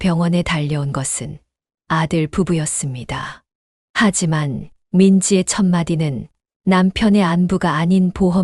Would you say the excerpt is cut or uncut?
uncut